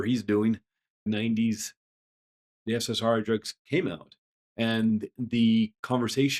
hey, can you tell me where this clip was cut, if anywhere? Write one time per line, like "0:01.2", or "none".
0:00.9